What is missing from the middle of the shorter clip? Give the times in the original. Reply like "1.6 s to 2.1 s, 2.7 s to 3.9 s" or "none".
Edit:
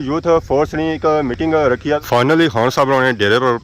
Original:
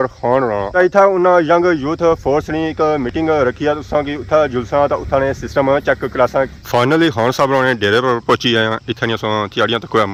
3.8 s to 6.7 s